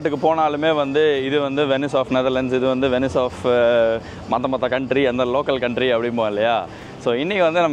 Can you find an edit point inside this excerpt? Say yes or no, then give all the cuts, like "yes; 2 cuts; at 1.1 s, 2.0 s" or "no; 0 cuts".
no; 0 cuts